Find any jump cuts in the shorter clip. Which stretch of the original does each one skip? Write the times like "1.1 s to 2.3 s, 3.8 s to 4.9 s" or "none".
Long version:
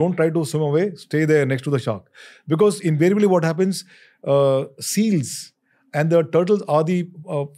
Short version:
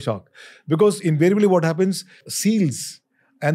4.1 s to 4.8 s